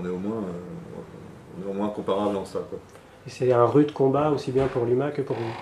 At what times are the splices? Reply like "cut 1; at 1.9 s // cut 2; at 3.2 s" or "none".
none